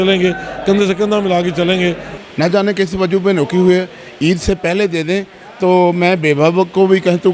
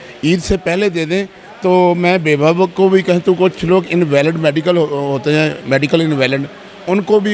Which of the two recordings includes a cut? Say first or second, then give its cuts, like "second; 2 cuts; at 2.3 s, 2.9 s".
first; 1 cut; at 2.1 s